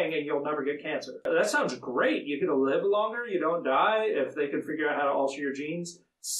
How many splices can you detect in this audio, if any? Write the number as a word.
one